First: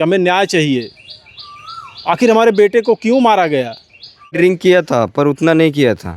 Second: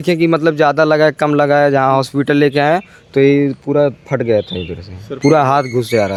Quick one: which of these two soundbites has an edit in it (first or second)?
first